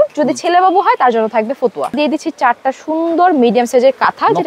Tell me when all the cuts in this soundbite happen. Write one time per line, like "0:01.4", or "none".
0:02.0

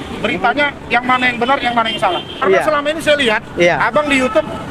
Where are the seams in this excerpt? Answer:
0:02.4

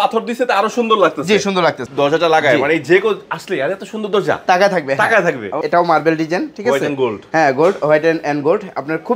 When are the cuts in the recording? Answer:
0:01.8
0:05.6

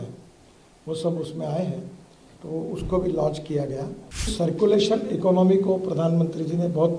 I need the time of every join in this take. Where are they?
0:04.3

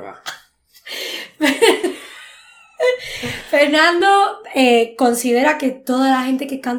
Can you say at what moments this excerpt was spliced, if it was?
none

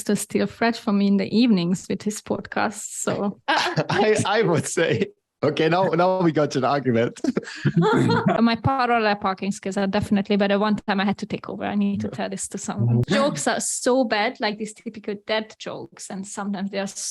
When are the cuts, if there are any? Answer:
0:03.4
0:08.4
0:13.0

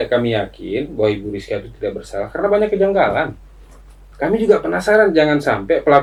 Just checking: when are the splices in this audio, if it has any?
none

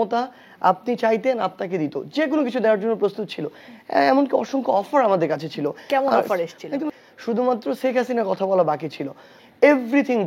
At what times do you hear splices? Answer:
0:06.9

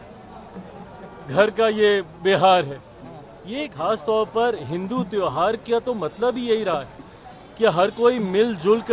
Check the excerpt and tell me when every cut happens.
0:03.7

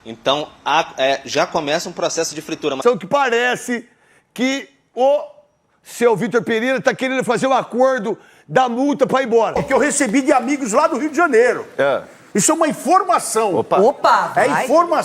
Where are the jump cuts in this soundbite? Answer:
0:02.8
0:09.6

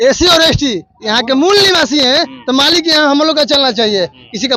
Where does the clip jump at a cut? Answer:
none

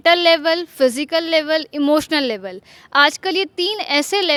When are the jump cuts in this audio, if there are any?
none

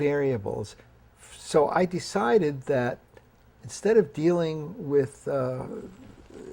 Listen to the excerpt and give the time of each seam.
0:02.3

